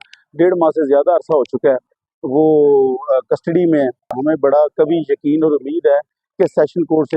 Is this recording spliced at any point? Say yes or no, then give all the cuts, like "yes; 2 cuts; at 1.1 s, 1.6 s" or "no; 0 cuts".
yes; 1 cut; at 4.1 s